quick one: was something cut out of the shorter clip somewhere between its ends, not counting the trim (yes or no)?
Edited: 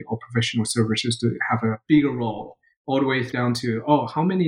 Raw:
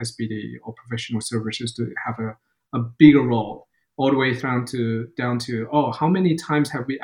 yes